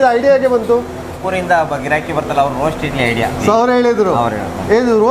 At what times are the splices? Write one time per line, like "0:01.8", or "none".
0:03.4

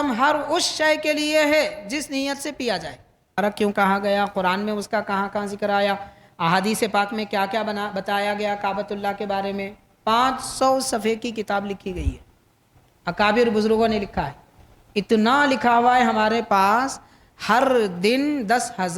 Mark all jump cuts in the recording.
0:03.4

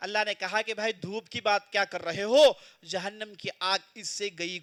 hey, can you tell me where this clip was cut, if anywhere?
none

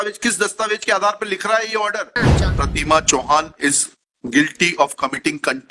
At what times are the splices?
0:02.3

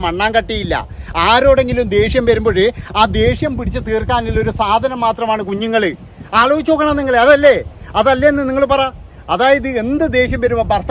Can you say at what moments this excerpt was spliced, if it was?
none

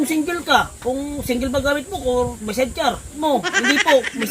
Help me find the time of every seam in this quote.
0:03.2

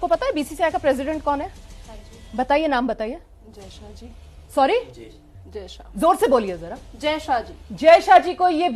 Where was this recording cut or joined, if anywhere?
none

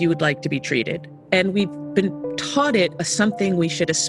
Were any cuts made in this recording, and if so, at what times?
0:02.9

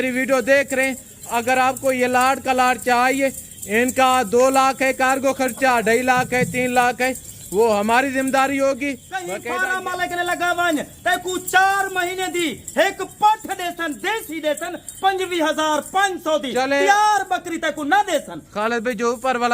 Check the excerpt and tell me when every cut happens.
0:09.3

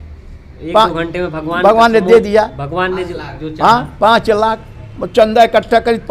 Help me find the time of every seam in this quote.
none

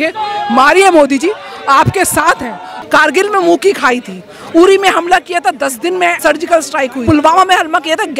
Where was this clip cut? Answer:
0:02.6
0:06.2
0:07.0

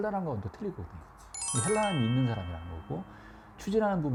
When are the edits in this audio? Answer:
none

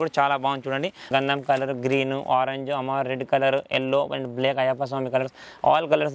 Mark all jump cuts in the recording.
0:01.1

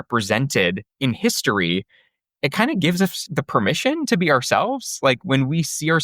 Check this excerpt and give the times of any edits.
0:00.9
0:03.2

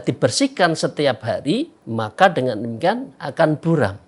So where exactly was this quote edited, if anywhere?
0:01.8

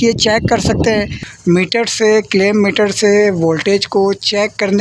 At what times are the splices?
0:01.3

